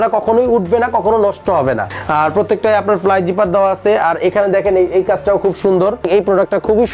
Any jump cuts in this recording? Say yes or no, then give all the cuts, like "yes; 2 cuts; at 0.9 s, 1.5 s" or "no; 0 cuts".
yes; 2 cuts; at 1.9 s, 6.1 s